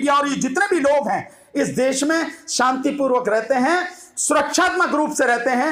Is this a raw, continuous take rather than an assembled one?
yes; 0 cuts

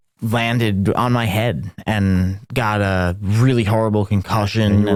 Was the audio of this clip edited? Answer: no; 0 cuts

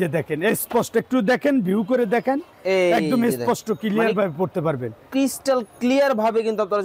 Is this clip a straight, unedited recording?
yes; 0 cuts

